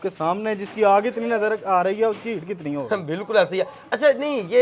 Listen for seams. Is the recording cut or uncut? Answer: uncut